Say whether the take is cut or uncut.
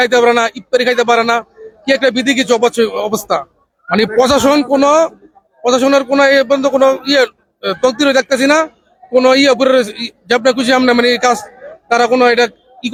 uncut